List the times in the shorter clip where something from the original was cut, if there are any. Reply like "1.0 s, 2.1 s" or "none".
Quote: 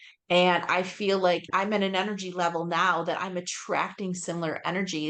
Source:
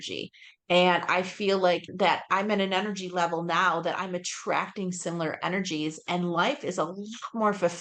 1.5 s

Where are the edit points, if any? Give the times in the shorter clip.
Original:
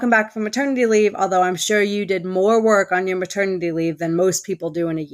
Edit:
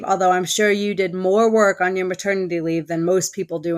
none

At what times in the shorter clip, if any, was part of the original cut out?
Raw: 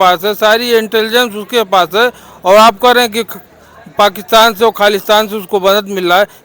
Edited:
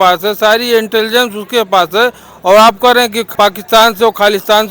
3.2 s

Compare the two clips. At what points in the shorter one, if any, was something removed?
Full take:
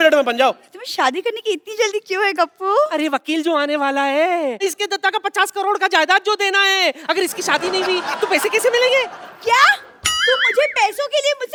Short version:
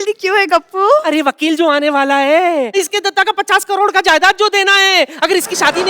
none

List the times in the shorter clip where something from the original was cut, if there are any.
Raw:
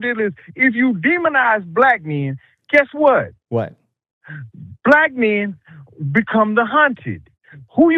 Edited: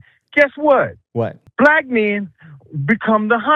1.4 s

